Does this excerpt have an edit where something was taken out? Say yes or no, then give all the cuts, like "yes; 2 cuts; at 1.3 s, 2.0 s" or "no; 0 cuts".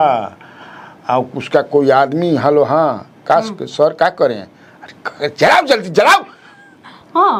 no; 0 cuts